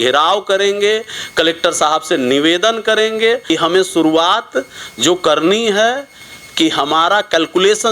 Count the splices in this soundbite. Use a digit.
1